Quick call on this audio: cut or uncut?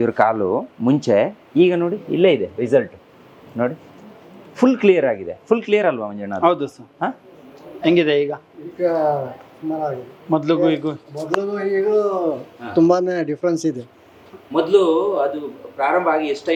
uncut